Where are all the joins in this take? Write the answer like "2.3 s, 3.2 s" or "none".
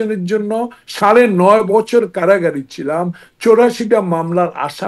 none